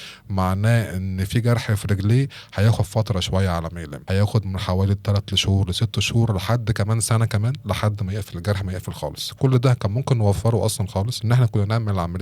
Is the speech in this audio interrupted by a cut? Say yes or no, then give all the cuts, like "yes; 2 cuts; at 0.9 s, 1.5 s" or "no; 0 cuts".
yes; 2 cuts; at 3.9 s, 11.2 s